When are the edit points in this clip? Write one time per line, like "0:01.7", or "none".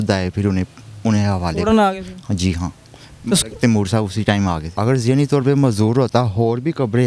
0:04.8